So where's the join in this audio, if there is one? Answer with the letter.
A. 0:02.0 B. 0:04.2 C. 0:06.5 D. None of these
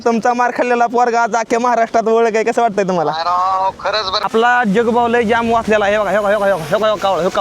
B